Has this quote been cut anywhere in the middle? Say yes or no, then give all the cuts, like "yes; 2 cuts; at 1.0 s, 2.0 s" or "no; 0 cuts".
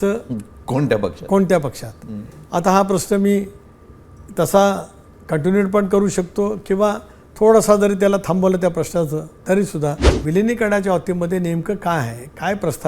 yes; 1 cut; at 10.1 s